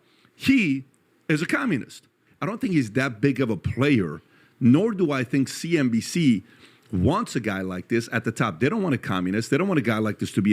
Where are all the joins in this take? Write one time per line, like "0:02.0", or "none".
0:02.1